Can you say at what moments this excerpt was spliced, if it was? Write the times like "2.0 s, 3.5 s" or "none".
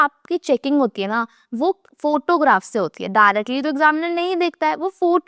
none